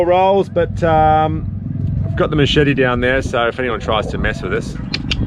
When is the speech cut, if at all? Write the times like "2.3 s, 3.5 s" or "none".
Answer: none